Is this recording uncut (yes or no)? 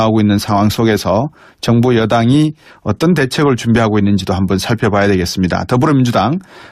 yes